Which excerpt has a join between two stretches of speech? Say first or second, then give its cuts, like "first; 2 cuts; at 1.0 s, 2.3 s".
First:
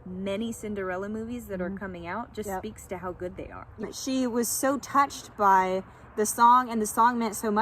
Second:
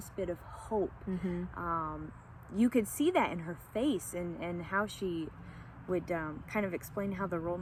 first; 1 cut; at 3.8 s